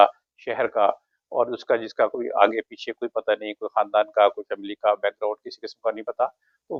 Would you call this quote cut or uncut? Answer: uncut